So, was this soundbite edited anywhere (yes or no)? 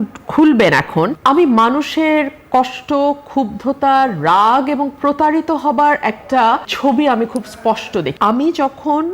yes